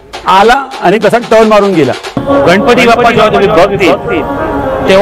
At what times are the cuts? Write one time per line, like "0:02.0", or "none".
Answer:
0:02.1